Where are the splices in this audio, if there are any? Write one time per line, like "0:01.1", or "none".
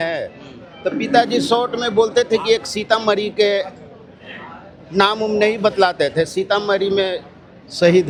none